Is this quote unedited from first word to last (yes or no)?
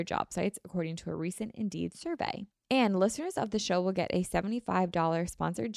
no